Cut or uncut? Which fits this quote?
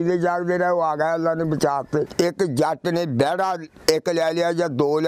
cut